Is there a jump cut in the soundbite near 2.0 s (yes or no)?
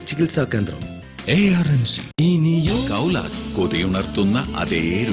yes